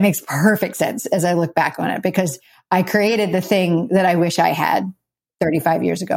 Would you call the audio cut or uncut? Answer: cut